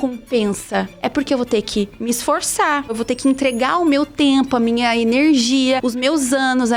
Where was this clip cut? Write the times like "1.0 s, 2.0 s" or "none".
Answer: 2.9 s, 5.8 s